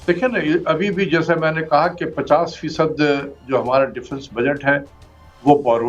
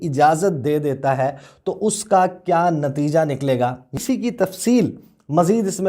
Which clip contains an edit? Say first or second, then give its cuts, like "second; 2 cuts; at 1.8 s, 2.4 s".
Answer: second; 1 cut; at 3.9 s